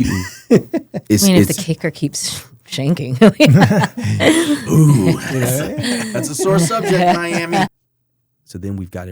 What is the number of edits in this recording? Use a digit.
1